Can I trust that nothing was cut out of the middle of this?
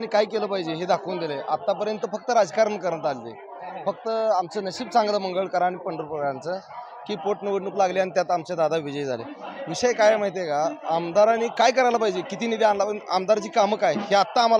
yes; 0 cuts

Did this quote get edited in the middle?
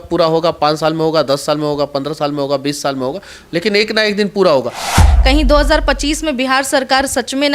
yes; 1 cut; at 5.0 s

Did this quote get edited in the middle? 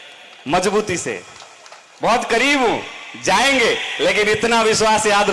no; 0 cuts

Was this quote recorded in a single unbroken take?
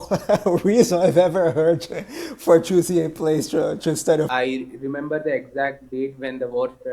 no; 1 cut; at 4.3 s

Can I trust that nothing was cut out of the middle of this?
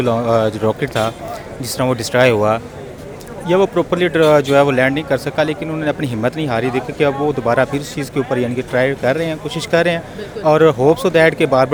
yes; 0 cuts

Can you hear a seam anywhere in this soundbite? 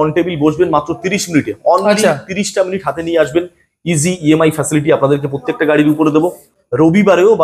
yes; 1 cut; at 6.5 s

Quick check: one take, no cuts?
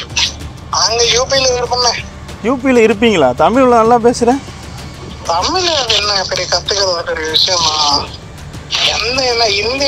yes; 0 cuts

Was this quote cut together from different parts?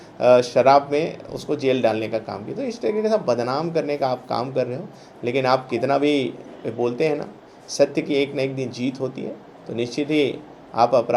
no; 0 cuts

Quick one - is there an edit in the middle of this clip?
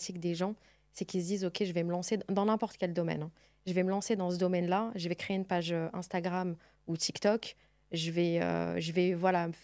no; 0 cuts

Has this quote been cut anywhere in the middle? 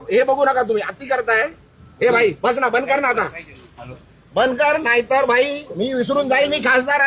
no; 0 cuts

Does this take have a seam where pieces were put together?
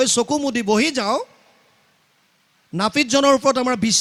no; 0 cuts

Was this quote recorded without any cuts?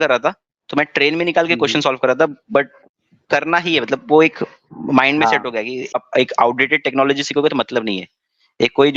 no; 1 cut; at 5.9 s

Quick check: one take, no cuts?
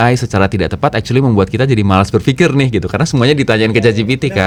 yes; 0 cuts

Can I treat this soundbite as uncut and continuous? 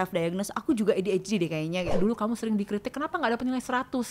no; 1 cut; at 1.9 s

